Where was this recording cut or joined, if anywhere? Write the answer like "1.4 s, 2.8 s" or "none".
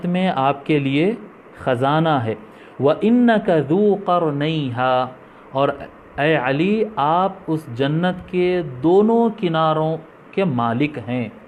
none